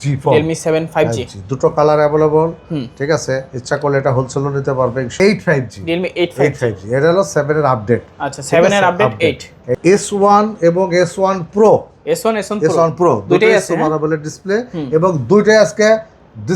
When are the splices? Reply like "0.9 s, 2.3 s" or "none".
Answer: 5.1 s, 9.8 s